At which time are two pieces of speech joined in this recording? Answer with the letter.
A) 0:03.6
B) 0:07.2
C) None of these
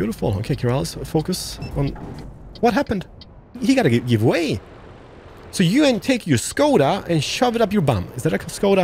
A